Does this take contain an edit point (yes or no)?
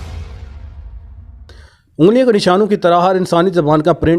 yes